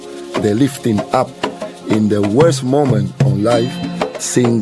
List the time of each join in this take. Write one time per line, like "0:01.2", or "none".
none